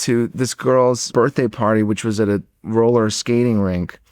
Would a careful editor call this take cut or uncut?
cut